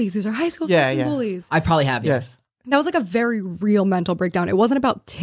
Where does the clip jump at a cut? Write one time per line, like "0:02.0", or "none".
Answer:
none